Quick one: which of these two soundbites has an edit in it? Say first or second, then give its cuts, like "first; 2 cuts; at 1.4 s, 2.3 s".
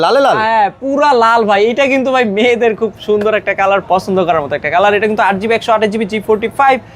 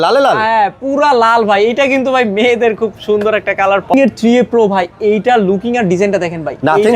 second; 1 cut; at 3.9 s